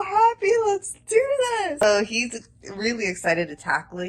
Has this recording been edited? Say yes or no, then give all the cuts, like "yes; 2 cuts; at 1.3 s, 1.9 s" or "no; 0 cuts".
yes; 1 cut; at 1.8 s